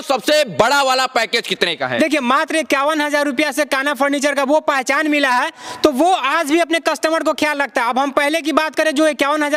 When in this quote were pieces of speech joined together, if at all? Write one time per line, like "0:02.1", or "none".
none